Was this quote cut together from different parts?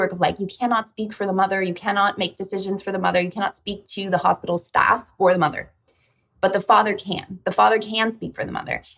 no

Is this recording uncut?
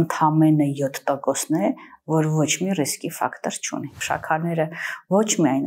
no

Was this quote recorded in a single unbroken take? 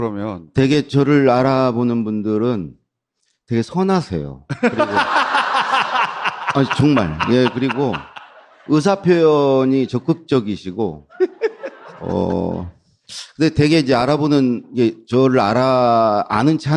yes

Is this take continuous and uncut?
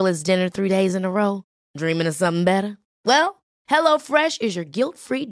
yes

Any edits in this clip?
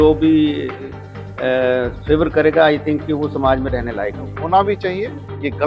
yes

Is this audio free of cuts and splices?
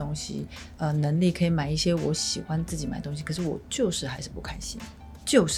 yes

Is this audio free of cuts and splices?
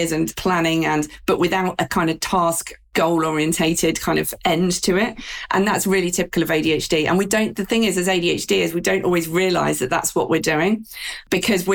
yes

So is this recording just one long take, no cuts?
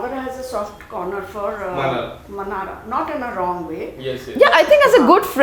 yes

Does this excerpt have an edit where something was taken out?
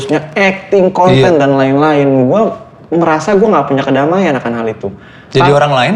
no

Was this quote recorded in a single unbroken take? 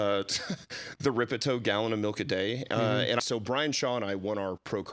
no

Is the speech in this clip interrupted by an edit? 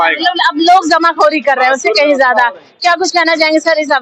no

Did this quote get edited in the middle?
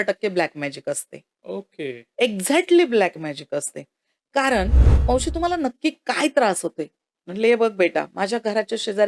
yes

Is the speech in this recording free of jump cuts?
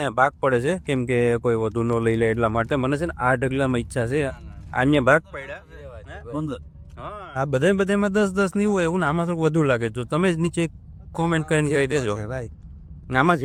yes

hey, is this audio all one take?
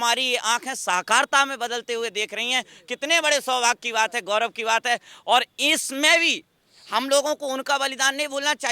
yes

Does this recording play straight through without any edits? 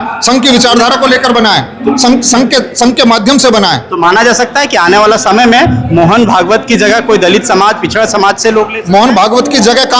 yes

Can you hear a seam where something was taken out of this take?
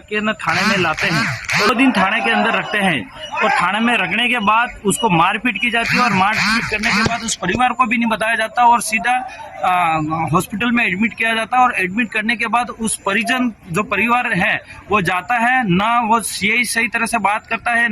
yes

